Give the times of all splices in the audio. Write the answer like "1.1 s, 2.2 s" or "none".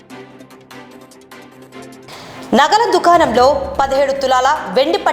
1.6 s